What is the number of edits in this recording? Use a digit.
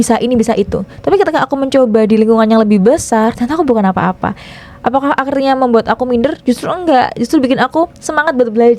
0